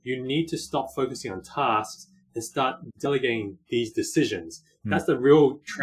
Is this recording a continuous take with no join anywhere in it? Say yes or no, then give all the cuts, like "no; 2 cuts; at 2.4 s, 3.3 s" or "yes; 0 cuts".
yes; 0 cuts